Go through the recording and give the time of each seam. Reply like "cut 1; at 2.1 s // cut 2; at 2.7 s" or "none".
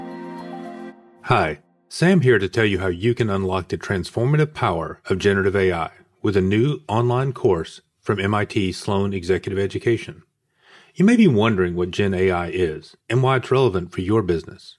cut 1; at 1.1 s